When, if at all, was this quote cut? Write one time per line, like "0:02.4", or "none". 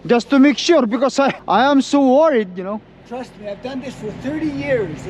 0:01.4